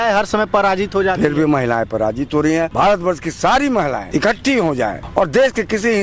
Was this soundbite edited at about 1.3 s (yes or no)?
no